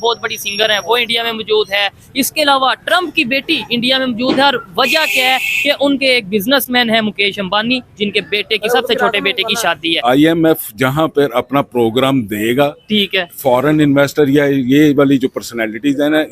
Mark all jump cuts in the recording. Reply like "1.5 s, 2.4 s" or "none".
10.0 s